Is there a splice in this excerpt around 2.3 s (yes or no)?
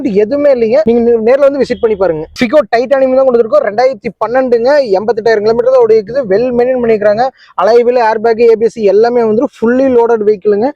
no